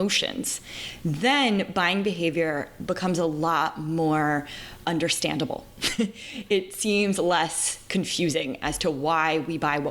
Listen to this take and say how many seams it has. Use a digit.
1